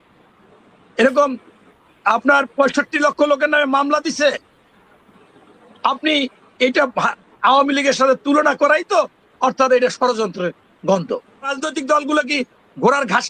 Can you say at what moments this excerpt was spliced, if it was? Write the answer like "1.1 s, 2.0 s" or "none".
11.5 s